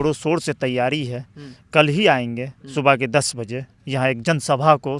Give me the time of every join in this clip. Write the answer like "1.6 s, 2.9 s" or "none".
none